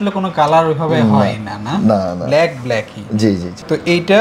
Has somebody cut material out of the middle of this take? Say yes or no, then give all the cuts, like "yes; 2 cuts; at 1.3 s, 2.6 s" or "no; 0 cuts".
no; 0 cuts